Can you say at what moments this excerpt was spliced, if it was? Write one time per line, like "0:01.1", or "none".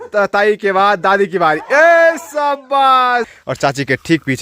0:03.3